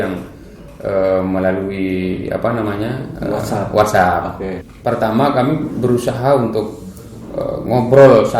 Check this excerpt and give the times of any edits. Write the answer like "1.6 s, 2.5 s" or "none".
4.5 s